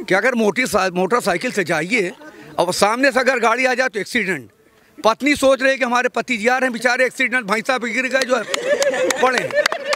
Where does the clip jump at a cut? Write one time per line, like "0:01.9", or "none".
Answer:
none